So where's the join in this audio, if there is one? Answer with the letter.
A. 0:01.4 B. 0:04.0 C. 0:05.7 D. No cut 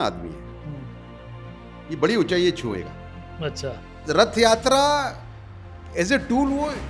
B